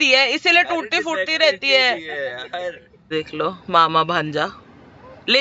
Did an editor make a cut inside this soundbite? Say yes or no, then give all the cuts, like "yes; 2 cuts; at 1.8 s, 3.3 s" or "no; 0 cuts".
yes; 1 cut; at 3.1 s